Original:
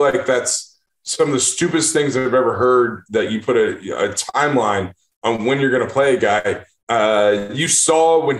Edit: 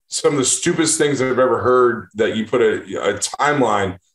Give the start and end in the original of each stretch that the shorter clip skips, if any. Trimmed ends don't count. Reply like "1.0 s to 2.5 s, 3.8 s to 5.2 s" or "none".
none